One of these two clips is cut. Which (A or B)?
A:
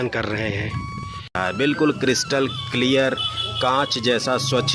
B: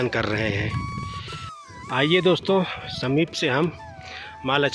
A